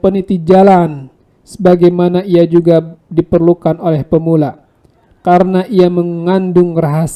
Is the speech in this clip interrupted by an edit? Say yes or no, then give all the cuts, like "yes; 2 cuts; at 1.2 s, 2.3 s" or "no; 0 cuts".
no; 0 cuts